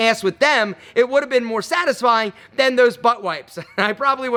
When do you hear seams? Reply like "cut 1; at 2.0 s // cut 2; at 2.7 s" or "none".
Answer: none